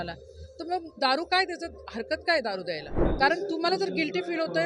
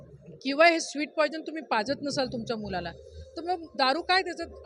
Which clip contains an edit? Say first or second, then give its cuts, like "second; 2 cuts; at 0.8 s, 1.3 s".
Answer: first; 1 cut; at 3.0 s